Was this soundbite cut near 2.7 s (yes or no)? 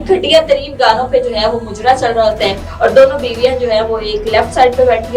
yes